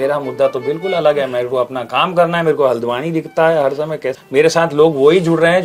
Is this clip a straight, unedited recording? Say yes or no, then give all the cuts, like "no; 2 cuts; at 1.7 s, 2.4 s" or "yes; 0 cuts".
no; 1 cut; at 4.1 s